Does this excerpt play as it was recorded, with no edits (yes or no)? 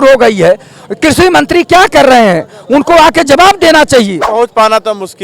no